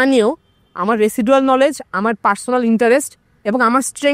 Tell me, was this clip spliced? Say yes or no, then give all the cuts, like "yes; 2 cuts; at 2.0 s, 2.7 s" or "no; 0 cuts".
no; 0 cuts